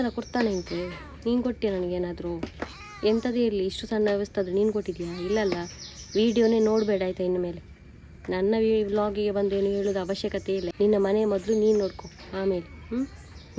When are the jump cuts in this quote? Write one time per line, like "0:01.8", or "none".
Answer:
0:10.7